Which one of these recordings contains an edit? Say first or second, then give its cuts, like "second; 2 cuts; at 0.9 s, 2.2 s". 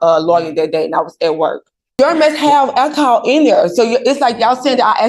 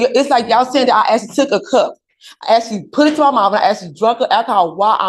first; 1 cut; at 1.8 s